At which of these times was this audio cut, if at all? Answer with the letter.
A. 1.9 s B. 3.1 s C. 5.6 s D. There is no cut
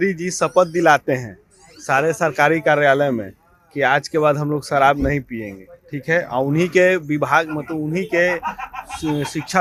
D